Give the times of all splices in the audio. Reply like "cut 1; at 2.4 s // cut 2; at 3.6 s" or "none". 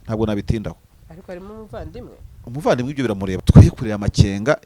cut 1; at 3.3 s